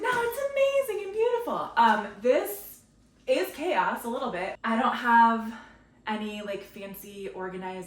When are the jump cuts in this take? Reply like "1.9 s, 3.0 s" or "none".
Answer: 4.5 s

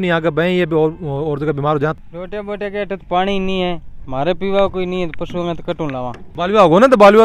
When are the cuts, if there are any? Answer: 1.9 s, 6.2 s

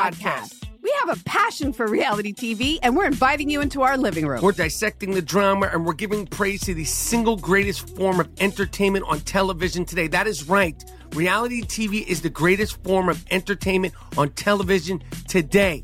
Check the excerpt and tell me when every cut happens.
4.6 s

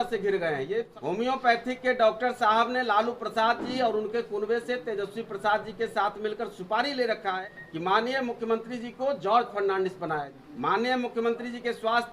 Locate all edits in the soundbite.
0.9 s, 7.4 s, 10.4 s

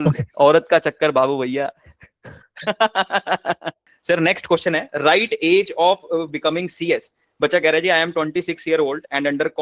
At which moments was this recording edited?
3.9 s

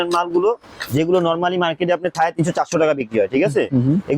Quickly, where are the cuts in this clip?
2.1 s

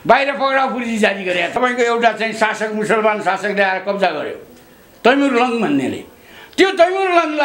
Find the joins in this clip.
1.6 s

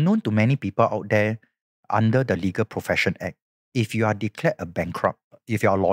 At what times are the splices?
none

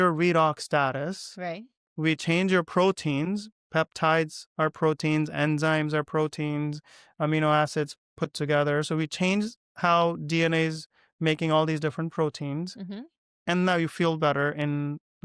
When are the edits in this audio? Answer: none

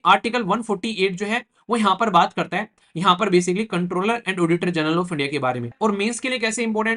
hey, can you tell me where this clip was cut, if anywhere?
5.7 s

